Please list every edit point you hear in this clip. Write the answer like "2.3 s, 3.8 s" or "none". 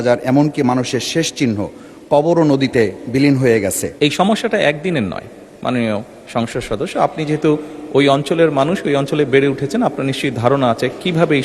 3.8 s